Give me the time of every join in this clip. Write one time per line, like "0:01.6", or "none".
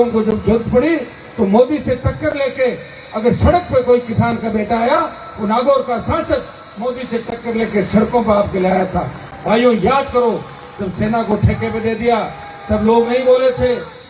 none